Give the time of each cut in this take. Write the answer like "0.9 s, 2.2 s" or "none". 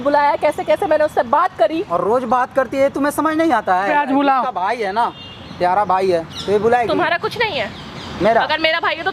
3.9 s

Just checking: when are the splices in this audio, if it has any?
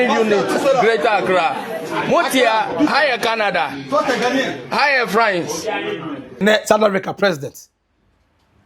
6.4 s

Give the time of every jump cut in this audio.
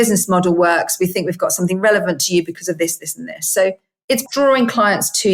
4.2 s

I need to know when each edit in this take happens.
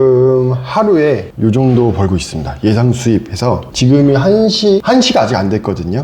1.3 s, 3.7 s, 4.8 s

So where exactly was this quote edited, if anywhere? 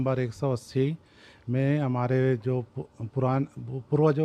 none

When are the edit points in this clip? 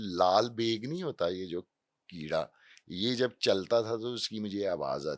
none

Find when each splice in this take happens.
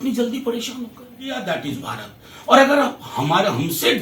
1.4 s

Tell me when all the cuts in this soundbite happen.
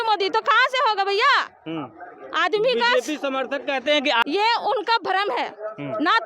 4.2 s

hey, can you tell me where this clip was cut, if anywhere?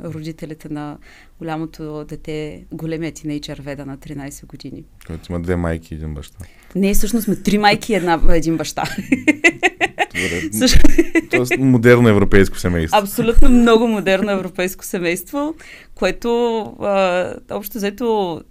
none

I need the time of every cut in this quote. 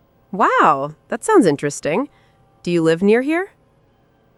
none

